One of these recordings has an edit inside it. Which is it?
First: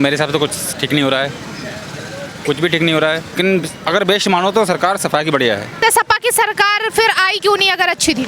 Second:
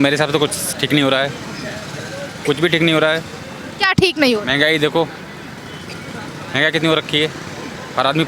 first; 2 cuts; at 3.3 s, 5.7 s

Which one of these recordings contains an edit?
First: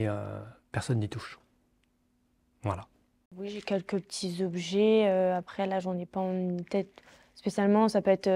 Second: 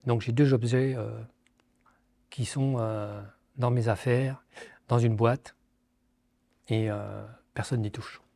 first; 1 cut; at 3.3 s

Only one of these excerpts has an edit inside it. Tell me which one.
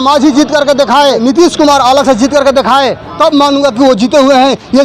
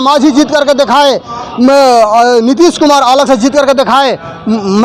first; 2 cuts; at 1.2 s, 3.0 s

